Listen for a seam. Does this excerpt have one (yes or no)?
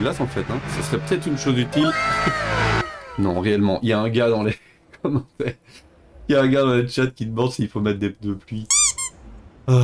yes